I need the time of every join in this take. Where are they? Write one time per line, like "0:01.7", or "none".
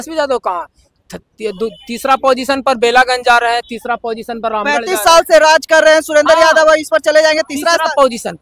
none